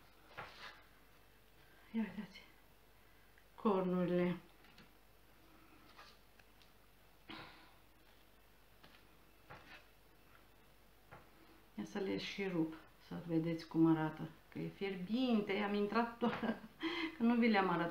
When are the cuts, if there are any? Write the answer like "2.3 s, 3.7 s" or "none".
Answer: none